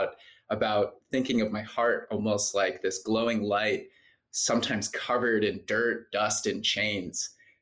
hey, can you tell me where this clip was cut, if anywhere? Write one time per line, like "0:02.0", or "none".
none